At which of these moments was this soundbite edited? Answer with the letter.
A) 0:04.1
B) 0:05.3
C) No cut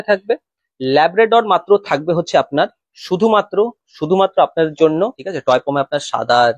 B